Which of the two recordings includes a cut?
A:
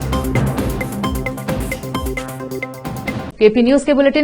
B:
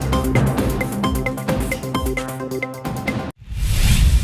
B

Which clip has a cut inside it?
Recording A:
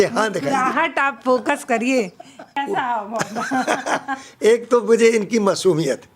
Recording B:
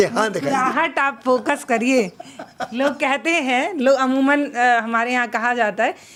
A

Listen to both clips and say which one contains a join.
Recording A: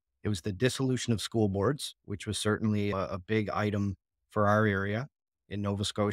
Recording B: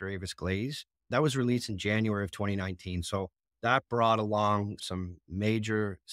B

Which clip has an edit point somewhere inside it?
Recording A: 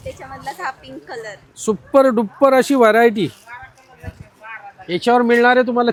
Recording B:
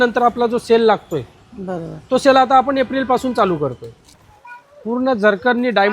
B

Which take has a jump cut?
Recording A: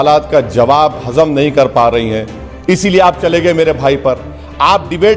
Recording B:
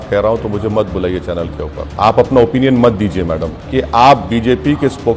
B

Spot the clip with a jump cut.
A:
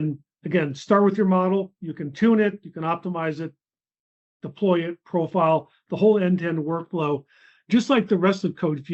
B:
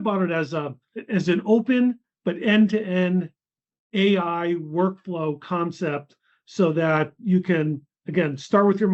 B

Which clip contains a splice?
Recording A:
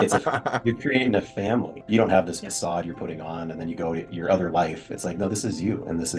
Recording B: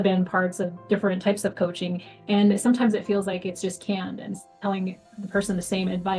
A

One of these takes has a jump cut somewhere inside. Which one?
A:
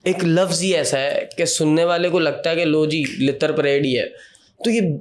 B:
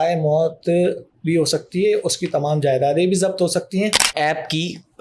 B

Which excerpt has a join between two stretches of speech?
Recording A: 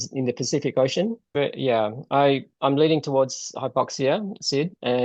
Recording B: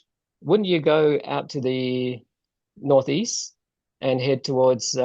A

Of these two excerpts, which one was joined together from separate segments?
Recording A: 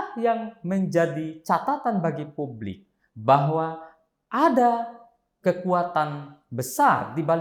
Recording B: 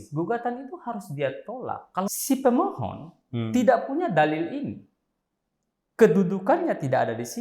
B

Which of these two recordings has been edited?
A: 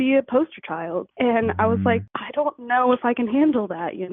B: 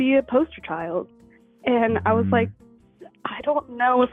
A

